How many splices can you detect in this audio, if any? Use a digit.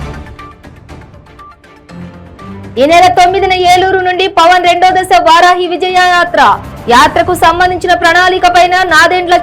1